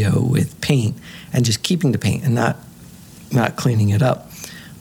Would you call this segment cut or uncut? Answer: uncut